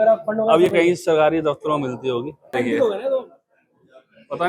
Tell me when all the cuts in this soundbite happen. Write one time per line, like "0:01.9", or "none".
0:02.6